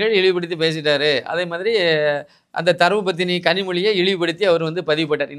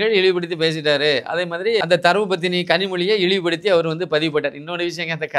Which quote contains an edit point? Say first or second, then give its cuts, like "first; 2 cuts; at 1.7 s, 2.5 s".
second; 1 cut; at 1.8 s